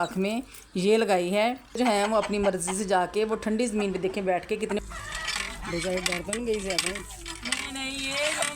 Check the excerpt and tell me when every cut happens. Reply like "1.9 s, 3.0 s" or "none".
1.8 s, 4.8 s

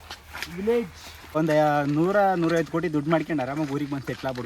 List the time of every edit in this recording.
1.4 s

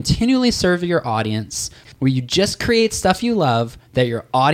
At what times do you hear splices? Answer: 1.8 s

